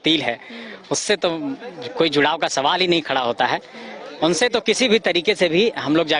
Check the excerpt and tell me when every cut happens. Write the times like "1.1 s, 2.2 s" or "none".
none